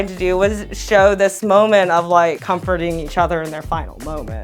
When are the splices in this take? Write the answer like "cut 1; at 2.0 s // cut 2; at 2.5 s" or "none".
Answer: cut 1; at 2.4 s